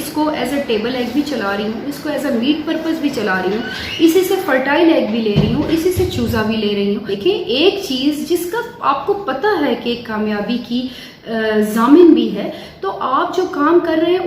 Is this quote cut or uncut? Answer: cut